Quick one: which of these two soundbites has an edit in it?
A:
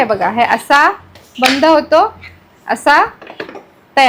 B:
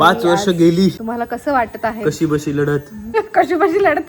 B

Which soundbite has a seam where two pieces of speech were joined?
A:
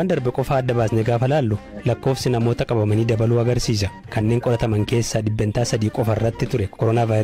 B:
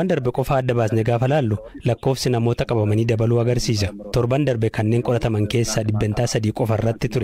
A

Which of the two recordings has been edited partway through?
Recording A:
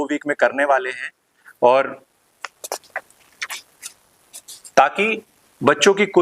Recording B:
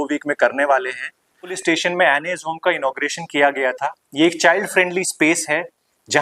B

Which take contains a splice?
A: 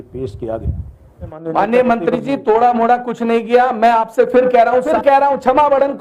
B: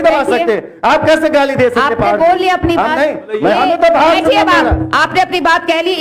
A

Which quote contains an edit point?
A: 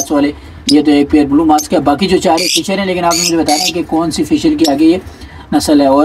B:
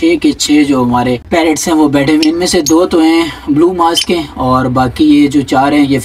B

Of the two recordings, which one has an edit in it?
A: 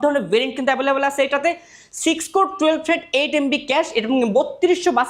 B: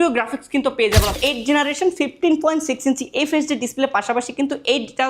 B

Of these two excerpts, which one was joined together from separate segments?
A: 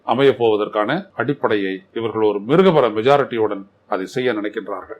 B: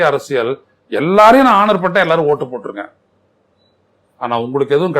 A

